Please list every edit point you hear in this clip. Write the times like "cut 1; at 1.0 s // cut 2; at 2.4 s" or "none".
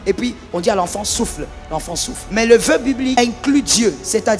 cut 1; at 2.4 s // cut 2; at 3.2 s